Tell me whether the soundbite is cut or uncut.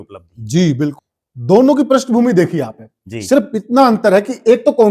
cut